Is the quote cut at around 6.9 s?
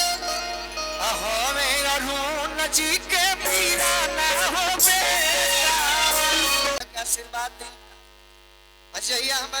yes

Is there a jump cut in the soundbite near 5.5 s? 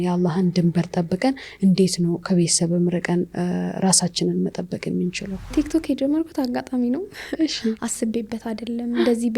yes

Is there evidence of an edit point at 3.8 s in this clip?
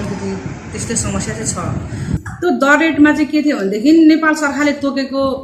no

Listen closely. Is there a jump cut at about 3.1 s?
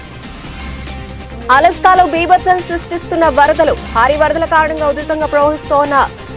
no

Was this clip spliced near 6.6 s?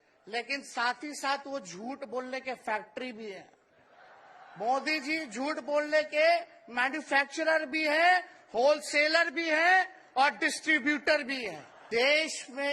no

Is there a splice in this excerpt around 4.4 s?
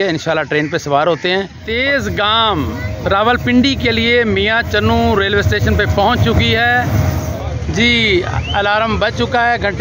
no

